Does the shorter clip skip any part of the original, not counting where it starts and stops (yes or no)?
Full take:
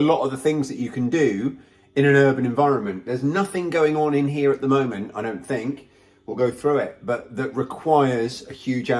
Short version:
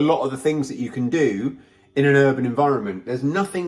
no